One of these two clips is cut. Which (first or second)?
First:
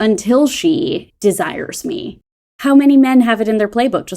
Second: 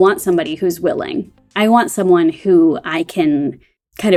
first